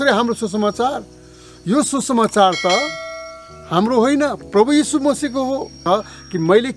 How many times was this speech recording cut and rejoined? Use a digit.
1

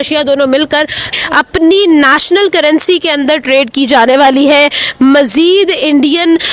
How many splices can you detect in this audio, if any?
1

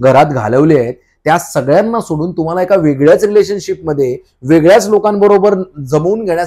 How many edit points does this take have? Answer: 0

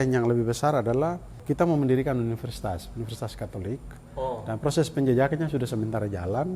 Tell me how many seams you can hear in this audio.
1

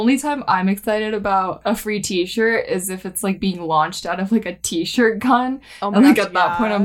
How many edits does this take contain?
1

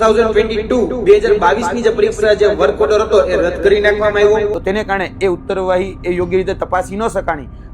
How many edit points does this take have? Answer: 1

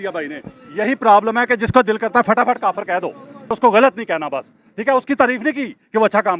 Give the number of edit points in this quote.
1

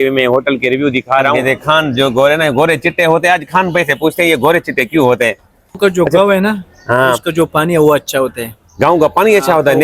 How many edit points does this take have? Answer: 2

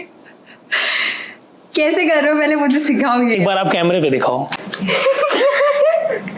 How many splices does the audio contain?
1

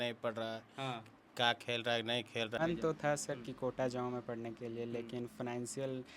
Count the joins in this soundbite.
1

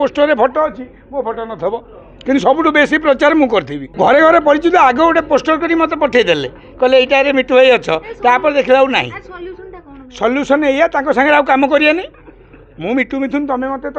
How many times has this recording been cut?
1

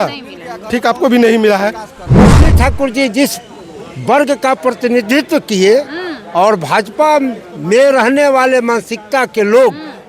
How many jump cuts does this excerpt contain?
1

